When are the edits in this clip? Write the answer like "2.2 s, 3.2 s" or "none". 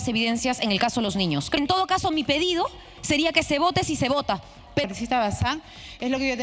1.6 s, 4.8 s